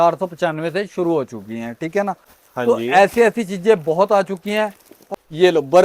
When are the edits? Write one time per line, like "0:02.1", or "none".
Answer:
0:02.3
0:05.0